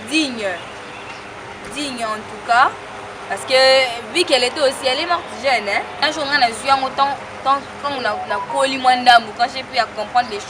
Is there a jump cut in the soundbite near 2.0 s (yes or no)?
no